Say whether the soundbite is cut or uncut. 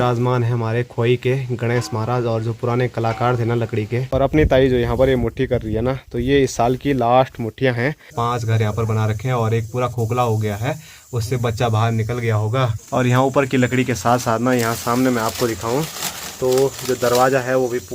cut